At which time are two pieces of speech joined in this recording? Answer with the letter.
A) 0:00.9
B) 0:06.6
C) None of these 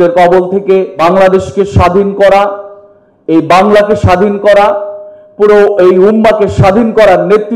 A